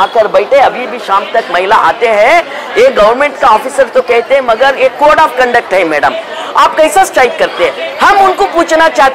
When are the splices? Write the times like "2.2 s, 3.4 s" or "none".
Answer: none

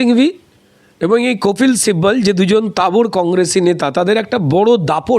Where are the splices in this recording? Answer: none

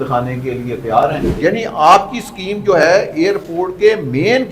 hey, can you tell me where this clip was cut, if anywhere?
1.3 s

